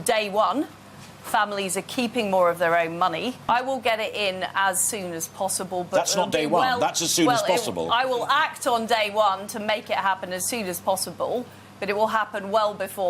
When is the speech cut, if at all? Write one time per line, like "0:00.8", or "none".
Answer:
0:03.4